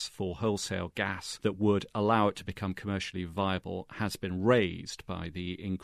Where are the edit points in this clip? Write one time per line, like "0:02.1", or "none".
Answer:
0:01.2